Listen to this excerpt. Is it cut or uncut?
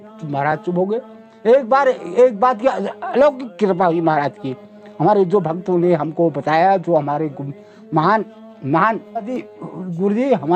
uncut